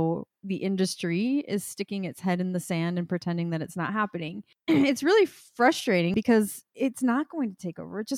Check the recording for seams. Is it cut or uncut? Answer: cut